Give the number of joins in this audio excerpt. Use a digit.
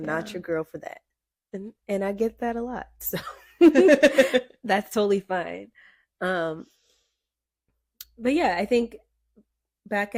0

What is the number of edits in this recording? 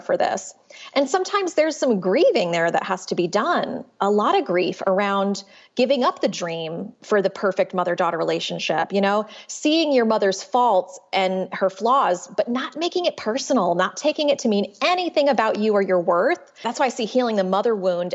1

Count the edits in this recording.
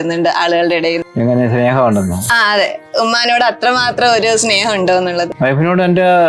2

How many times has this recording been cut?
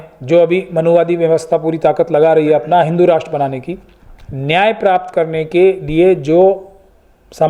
0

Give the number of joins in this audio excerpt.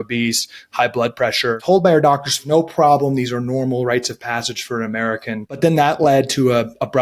3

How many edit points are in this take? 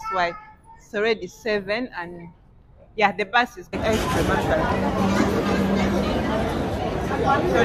1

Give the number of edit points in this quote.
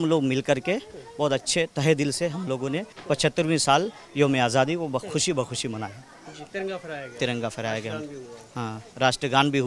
0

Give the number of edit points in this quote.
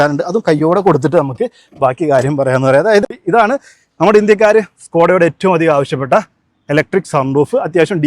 1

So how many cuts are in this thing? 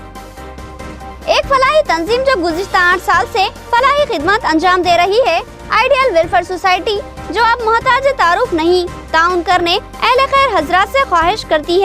0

